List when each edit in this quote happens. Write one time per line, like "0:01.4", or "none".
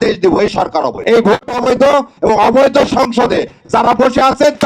0:01.0